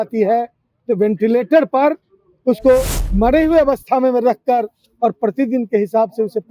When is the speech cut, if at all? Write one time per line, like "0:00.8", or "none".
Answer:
0:03.0